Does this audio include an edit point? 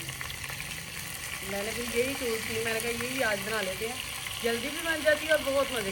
no; 0 cuts

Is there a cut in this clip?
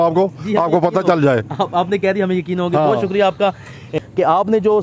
yes; 1 cut; at 3.9 s

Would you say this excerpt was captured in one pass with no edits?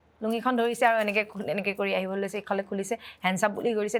yes; 0 cuts

